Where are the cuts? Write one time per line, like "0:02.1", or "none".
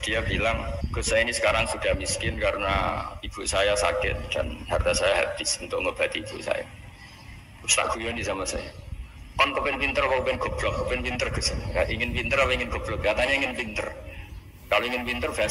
0:00.9